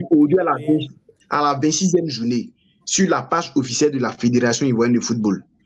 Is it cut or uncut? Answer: uncut